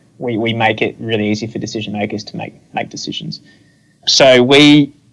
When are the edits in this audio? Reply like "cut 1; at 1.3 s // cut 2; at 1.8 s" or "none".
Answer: cut 1; at 4.0 s